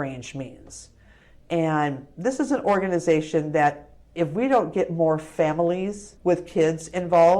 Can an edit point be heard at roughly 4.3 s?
no; 1 cut; at 6.0 s

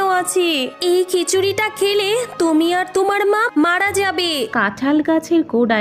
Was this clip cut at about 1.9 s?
no; 1 cut; at 4.5 s

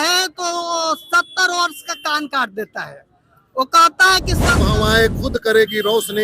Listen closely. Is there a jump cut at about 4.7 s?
yes; 1 cut; at 4.7 s

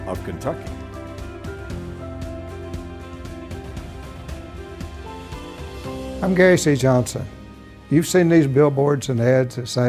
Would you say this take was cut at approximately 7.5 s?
no; 1 cut; at 6.2 s

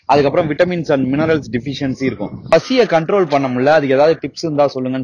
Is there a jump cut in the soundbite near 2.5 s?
yes; 1 cut; at 2.5 s

